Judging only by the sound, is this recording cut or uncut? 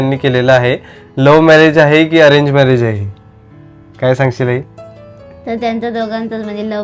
uncut